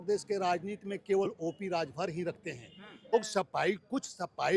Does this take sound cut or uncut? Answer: cut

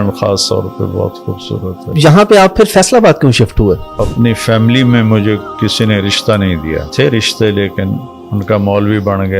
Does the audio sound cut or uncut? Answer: cut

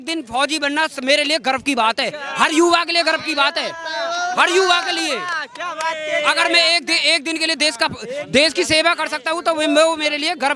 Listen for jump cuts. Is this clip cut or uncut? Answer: uncut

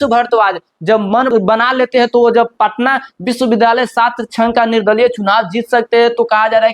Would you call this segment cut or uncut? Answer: cut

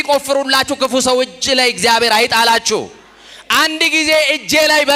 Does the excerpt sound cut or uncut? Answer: uncut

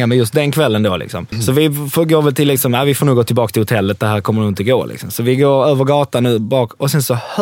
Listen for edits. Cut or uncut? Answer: cut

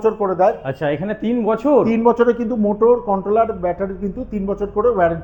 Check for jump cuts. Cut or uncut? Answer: uncut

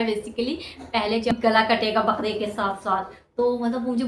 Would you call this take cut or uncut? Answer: cut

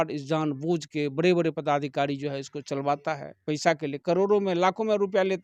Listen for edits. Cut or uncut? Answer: uncut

